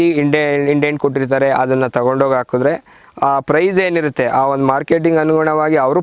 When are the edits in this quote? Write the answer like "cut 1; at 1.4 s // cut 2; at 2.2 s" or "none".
none